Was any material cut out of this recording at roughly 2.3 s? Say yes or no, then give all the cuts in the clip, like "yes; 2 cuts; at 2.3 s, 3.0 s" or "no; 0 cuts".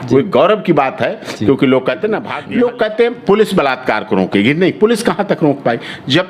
yes; 1 cut; at 2.3 s